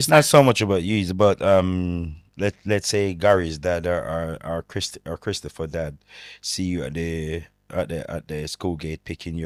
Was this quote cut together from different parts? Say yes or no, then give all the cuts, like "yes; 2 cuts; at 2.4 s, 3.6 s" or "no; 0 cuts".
no; 0 cuts